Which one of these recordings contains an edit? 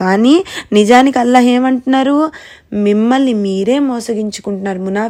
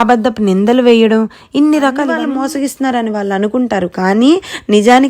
second; 1 cut; at 2.2 s

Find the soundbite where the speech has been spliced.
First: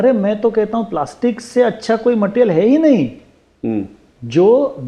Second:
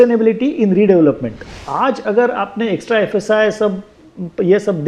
second; 1 cut; at 1.6 s

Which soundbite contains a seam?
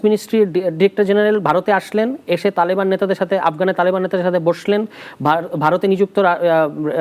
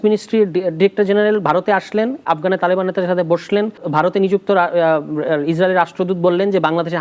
second; 2 cuts; at 2.2 s, 3.8 s

